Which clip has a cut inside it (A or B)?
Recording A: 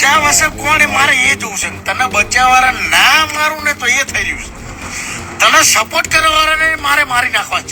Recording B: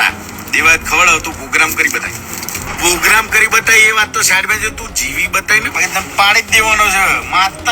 B